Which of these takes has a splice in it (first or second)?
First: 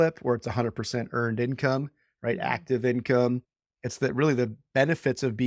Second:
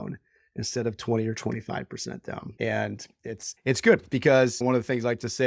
second